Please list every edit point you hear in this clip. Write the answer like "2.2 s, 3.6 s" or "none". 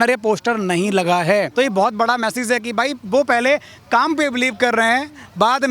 none